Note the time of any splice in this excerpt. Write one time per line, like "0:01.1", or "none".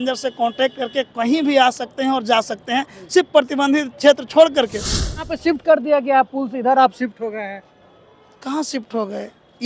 0:05.3